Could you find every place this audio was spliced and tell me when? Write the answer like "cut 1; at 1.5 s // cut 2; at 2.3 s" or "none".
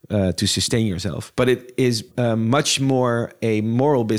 cut 1; at 1.2 s // cut 2; at 2.1 s